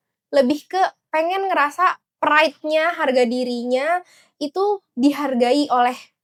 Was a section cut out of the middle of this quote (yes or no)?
no